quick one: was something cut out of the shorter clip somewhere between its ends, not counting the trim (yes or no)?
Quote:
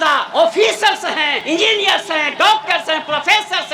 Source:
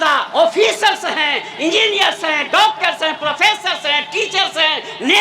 yes